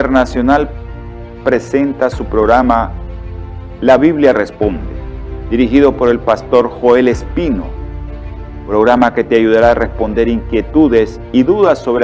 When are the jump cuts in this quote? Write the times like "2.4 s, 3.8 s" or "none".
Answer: 1.7 s